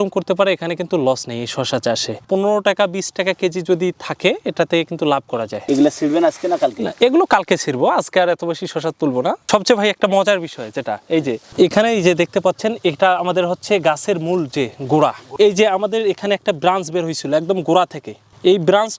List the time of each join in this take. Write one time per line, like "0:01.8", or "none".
none